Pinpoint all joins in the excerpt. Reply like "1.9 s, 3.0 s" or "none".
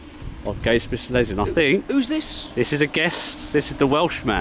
3.0 s